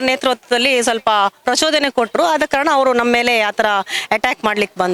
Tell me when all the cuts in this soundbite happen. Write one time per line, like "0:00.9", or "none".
none